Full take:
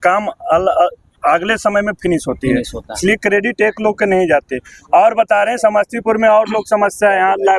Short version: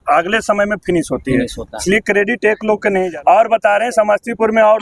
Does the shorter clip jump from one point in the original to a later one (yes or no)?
yes